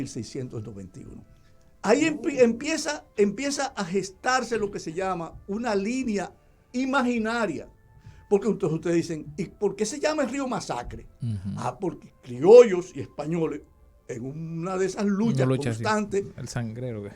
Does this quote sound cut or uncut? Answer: uncut